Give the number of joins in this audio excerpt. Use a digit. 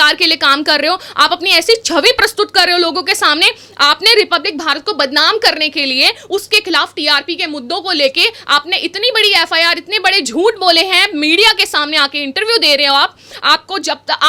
0